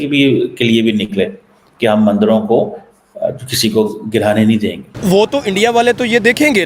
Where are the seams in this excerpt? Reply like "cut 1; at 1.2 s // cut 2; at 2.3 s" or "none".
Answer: cut 1; at 5.0 s